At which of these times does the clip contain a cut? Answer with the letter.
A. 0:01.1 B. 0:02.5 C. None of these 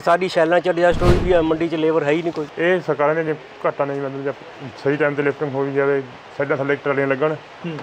B